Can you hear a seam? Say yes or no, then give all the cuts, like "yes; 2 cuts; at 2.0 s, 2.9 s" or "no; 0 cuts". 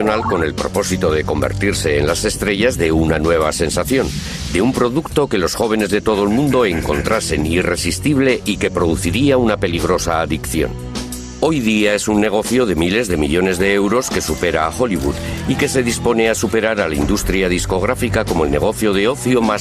no; 0 cuts